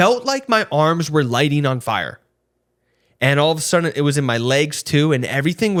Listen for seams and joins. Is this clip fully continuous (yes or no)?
yes